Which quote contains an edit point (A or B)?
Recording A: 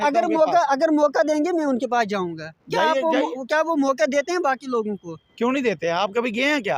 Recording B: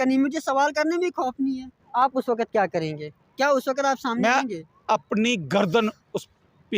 B